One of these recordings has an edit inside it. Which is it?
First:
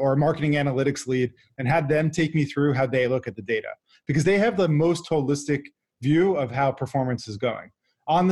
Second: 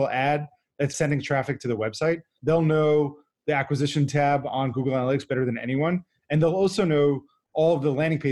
second; 2 cuts; at 0.9 s, 2.3 s

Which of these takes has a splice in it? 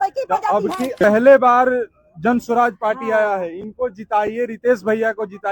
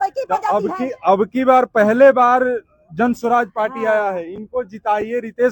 first; 1 cut; at 1.0 s

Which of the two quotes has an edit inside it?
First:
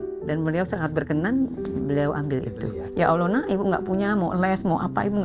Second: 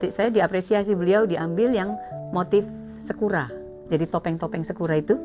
first; 1 cut; at 2.8 s

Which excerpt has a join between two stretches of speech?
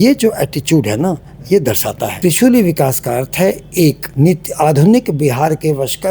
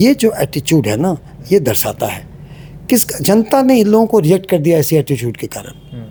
first; 2 cuts; at 2.1 s, 4.0 s

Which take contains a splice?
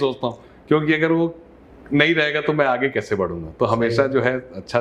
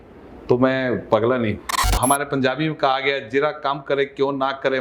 second; 1 cut; at 1.9 s

